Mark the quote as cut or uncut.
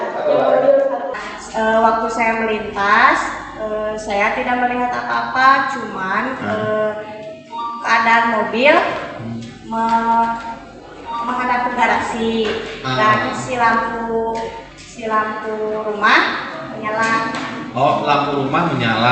cut